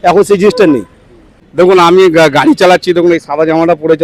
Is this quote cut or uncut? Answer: cut